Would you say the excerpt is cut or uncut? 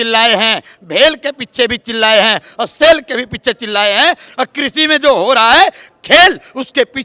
uncut